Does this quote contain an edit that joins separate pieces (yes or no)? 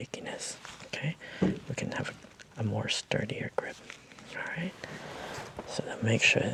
no